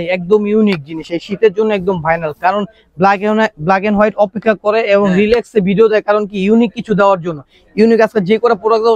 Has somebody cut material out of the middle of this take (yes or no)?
no